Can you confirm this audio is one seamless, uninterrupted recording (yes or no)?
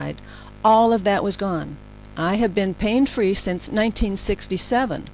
yes